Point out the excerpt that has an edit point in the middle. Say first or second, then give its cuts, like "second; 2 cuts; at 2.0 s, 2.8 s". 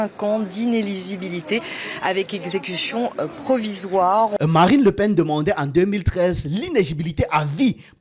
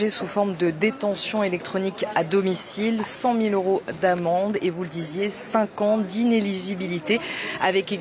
first; 1 cut; at 4.3 s